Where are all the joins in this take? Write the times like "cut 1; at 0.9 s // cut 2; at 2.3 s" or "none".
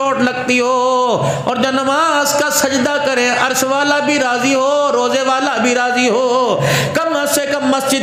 none